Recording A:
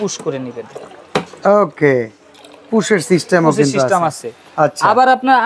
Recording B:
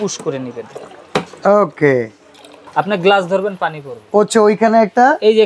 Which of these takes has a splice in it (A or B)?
B